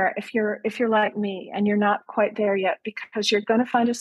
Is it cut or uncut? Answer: uncut